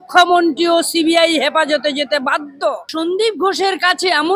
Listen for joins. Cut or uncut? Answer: cut